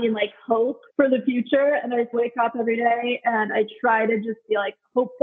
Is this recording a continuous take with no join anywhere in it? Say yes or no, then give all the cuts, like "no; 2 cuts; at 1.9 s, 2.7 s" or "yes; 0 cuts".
no; 2 cuts; at 0.8 s, 2.1 s